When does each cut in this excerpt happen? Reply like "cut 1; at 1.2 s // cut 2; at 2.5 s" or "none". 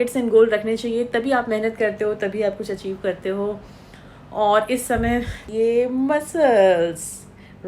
cut 1; at 5.4 s